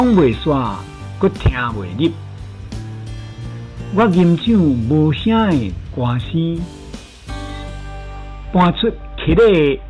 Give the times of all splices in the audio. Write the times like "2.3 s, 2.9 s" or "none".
7.2 s, 8.4 s